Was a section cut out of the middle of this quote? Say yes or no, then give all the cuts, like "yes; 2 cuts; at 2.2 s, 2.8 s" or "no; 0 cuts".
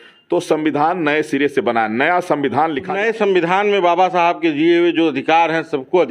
yes; 1 cut; at 2.9 s